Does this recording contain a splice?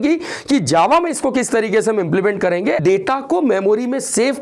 yes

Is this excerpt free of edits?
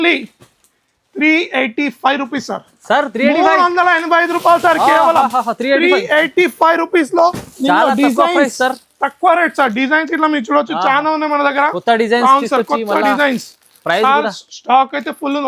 yes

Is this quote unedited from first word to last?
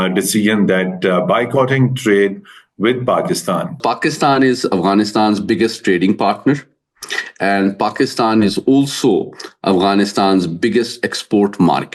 no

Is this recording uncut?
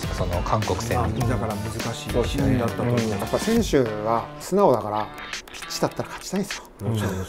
no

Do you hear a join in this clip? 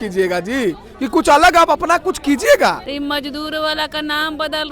yes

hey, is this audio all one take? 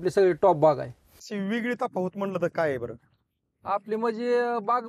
no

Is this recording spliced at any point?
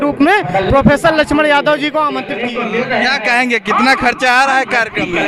yes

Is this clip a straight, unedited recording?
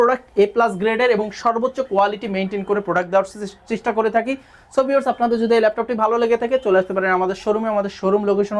yes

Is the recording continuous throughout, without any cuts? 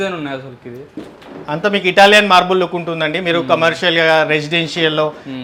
yes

